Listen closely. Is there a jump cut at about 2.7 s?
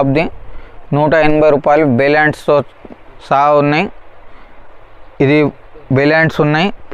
no; 0 cuts

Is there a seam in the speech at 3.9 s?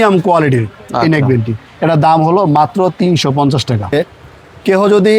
yes; 1 cut; at 3.9 s

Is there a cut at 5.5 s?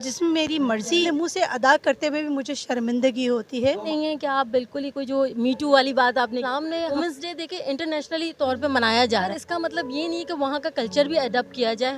no; 4 cuts; at 1.0 s, 3.9 s, 7.0 s, 9.3 s

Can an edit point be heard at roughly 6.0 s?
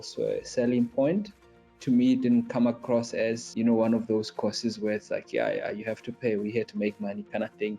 no; 1 cut; at 3.4 s

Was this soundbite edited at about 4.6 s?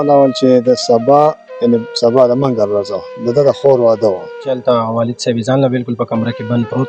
yes; 1 cut; at 4.6 s

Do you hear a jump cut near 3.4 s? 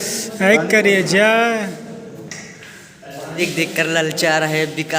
yes; 1 cut; at 3.4 s

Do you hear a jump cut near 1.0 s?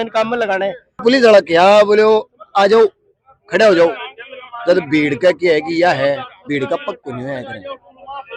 yes; 1 cut; at 1.0 s

